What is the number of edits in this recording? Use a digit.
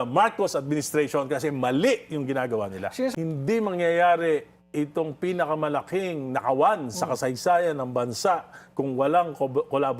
1